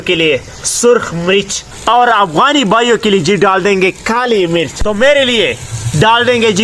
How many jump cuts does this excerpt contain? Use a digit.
2